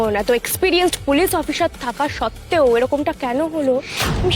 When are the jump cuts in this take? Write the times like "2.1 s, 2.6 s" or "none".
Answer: none